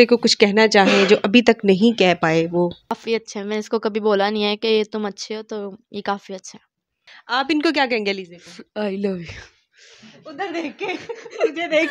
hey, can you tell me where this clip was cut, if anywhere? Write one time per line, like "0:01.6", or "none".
0:03.0
0:07.1